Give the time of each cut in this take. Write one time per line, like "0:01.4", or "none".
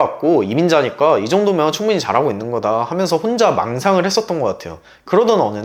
none